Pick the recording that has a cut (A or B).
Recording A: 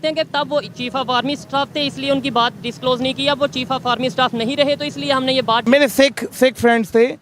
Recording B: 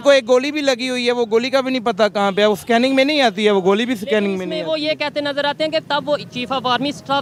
A